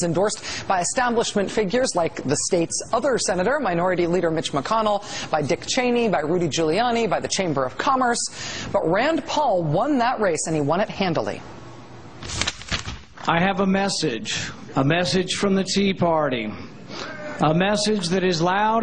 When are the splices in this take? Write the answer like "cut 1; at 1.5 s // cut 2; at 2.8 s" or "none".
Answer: none